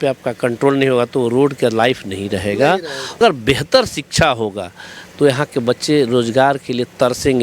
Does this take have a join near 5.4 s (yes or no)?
no